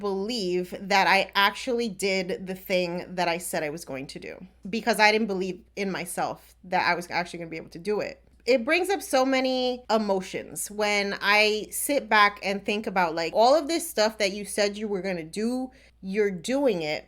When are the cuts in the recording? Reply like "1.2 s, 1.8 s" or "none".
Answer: 8.3 s, 9.8 s, 13.3 s